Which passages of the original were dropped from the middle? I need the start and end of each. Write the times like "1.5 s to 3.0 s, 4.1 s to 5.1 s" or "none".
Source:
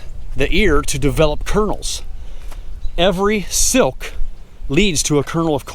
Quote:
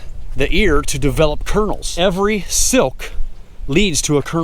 1.8 s to 2.9 s